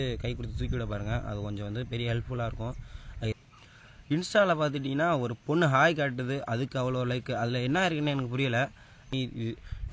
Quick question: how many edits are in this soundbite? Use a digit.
2